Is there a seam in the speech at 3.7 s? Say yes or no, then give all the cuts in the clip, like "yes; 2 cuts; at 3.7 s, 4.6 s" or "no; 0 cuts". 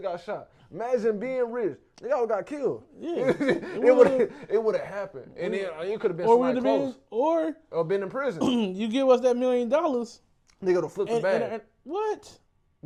no; 0 cuts